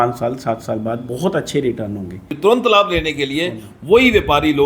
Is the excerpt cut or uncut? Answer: cut